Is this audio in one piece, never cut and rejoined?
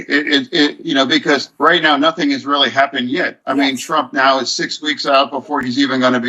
no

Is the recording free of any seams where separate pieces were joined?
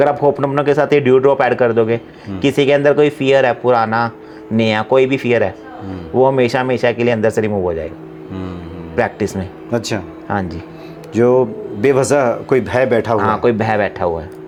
yes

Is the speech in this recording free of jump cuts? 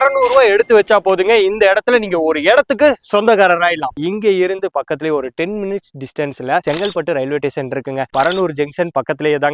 no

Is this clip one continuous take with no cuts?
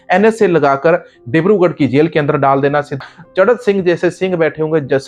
no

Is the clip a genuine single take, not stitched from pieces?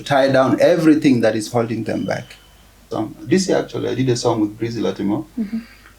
no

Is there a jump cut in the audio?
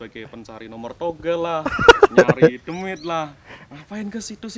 no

